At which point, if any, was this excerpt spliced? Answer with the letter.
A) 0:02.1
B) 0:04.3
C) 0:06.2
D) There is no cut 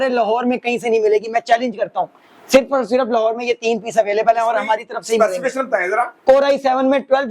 D